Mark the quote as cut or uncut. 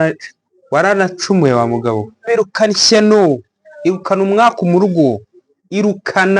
cut